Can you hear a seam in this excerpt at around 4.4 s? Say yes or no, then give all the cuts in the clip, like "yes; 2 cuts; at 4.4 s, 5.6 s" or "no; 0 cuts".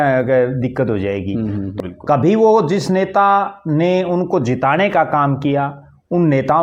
no; 1 cut; at 1.7 s